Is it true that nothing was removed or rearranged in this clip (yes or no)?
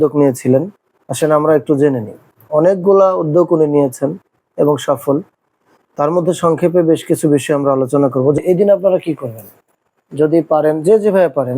no